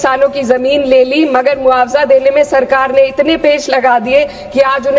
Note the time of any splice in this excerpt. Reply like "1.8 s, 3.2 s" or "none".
none